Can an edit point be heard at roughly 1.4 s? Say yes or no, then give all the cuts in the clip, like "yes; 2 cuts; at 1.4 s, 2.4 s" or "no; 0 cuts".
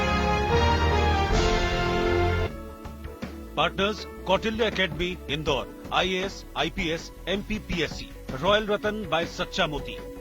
yes; 1 cut; at 1.4 s